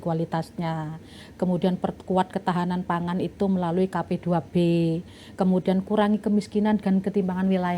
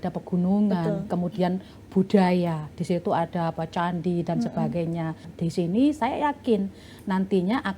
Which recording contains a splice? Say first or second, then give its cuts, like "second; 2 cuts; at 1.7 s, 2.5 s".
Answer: second; 1 cut; at 5.3 s